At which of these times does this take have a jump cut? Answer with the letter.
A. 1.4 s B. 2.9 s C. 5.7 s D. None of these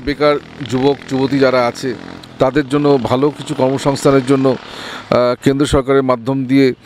D